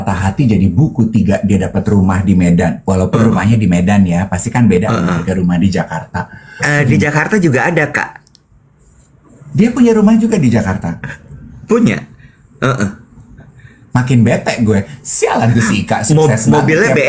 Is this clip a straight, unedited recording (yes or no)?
yes